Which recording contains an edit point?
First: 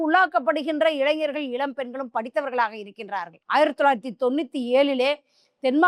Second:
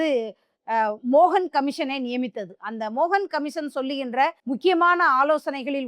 second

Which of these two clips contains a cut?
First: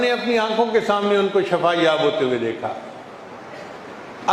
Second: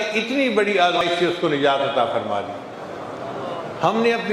second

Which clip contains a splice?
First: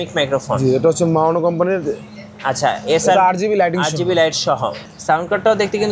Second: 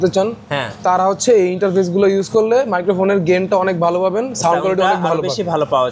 first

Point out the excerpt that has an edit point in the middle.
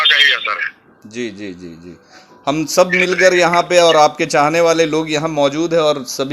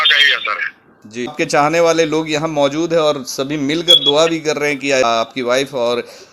second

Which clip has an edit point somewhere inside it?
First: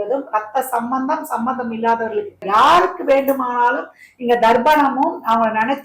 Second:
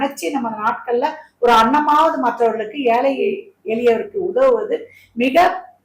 first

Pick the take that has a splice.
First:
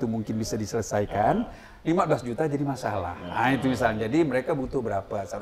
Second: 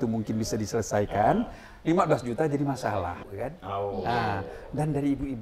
second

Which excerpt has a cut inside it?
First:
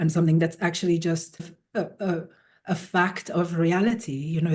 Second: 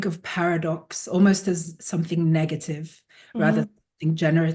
first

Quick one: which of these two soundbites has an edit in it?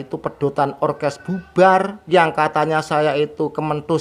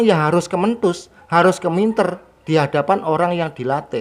first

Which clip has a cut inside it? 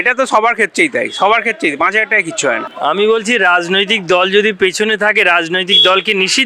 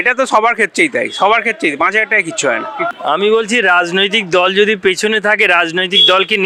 first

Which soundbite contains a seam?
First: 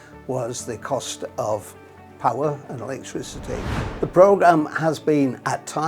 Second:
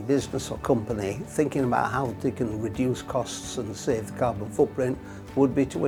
first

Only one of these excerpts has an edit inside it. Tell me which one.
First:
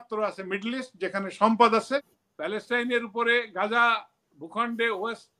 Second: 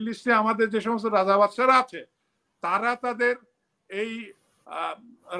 first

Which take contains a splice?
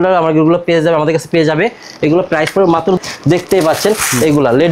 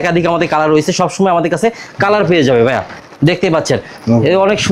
first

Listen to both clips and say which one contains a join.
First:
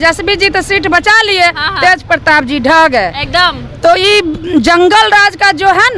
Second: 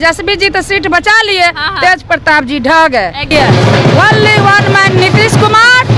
second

